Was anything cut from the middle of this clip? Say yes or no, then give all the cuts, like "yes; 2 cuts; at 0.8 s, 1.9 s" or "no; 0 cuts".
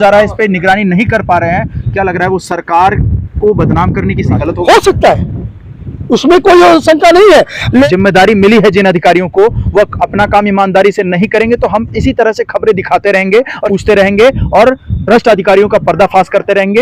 yes; 3 cuts; at 4.4 s, 7.9 s, 13.7 s